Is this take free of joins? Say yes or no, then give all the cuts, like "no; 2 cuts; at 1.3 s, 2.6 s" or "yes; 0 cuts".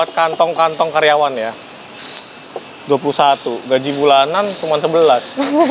yes; 0 cuts